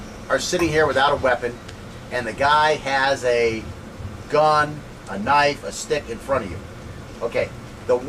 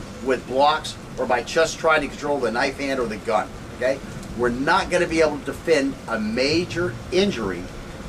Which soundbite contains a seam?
second; 1 cut; at 5.0 s

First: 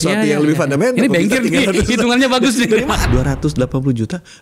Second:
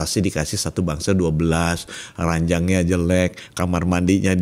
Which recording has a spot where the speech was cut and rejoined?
first; 1 cut; at 3.0 s

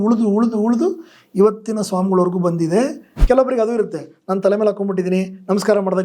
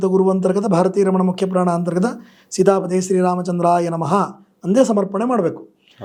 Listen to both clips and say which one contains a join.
first; 1 cut; at 3.1 s

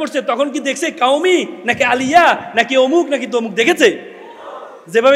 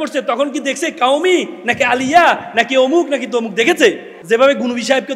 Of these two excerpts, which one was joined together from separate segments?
second; 1 cut; at 4.1 s

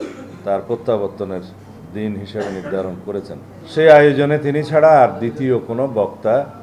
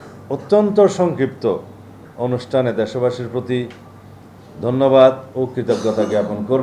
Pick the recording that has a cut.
first; 1 cut; at 3.5 s

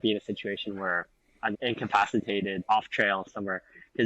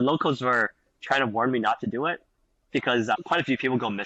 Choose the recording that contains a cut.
first; 1 cut; at 1.6 s

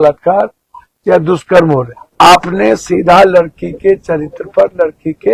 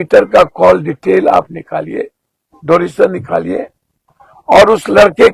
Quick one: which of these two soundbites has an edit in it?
first; 1 cut; at 2.0 s

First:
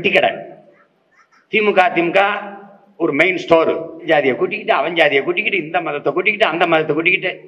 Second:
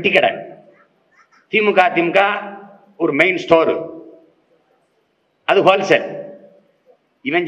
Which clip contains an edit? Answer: first; 1 cut; at 4.0 s

